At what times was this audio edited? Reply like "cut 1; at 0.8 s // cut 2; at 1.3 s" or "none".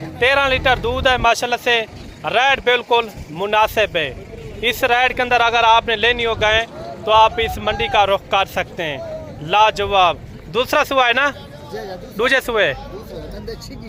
none